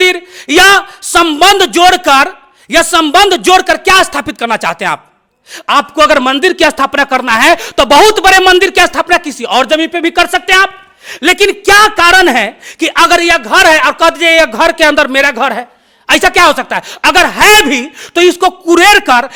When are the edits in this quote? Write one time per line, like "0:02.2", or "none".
none